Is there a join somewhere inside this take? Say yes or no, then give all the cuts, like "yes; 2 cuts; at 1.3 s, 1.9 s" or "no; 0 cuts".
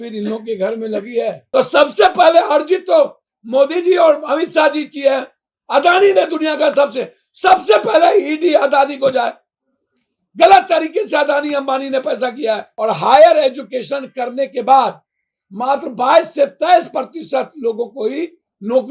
yes; 2 cuts; at 1.4 s, 12.7 s